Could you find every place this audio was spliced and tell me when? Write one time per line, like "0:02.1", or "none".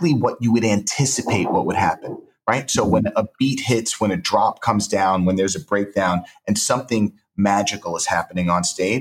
none